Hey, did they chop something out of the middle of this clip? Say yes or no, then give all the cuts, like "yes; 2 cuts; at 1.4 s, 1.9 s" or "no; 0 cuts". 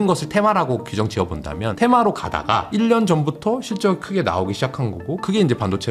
yes; 1 cut; at 1.7 s